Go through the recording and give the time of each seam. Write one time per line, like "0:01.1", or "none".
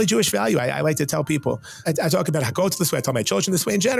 0:01.8